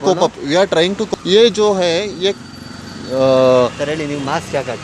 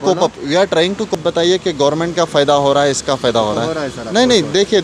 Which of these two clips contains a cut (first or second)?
first